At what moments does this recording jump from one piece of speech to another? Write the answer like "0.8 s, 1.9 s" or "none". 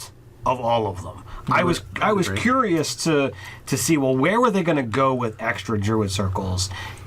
3.2 s